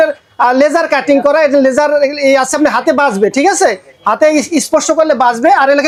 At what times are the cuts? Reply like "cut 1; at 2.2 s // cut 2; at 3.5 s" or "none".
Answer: none